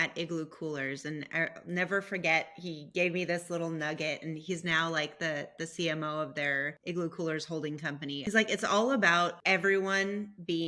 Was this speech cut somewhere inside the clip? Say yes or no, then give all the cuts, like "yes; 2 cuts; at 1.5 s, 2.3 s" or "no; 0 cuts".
yes; 3 cuts; at 6.7 s, 8.2 s, 9.4 s